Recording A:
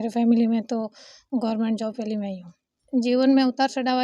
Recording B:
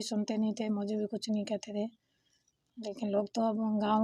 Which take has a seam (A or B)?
A